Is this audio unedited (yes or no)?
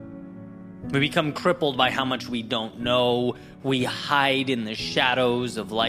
yes